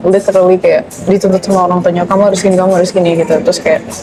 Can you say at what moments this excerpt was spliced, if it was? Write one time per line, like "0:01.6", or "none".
none